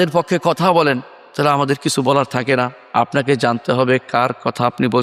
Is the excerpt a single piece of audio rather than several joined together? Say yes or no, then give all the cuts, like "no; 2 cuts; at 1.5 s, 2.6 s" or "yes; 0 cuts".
yes; 0 cuts